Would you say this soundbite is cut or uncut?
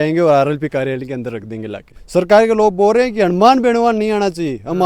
cut